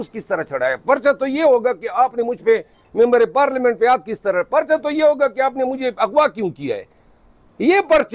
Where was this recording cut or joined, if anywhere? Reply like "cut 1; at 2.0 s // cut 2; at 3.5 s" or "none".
none